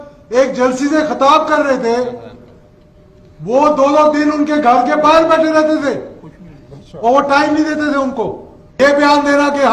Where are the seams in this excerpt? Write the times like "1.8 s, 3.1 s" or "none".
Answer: 8.8 s